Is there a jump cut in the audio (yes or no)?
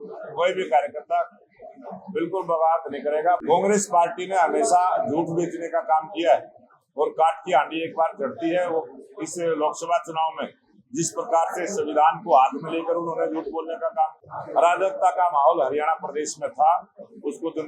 yes